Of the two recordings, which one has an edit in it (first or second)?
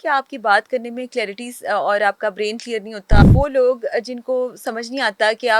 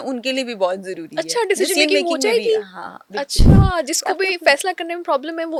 first